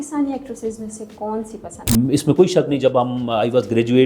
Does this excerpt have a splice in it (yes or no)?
yes